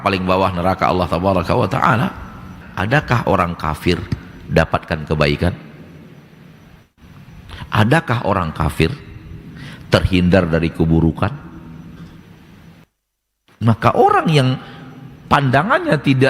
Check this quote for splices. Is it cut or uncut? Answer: cut